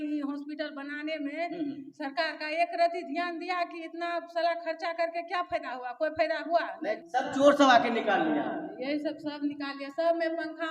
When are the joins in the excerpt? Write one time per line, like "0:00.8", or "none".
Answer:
0:07.0